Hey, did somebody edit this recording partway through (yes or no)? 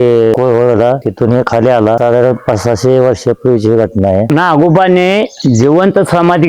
no